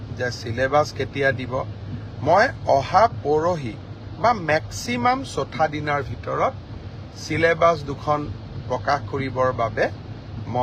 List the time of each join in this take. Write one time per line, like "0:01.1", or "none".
none